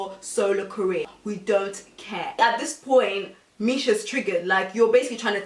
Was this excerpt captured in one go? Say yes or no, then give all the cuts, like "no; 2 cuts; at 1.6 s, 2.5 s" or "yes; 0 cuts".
no; 2 cuts; at 1.1 s, 2.3 s